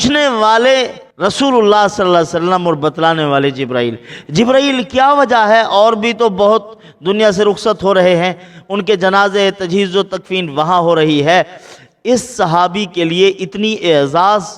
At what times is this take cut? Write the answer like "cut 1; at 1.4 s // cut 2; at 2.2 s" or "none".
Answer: cut 1; at 1.0 s